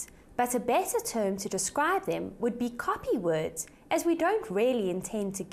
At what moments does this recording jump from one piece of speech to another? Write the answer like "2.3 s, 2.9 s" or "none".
none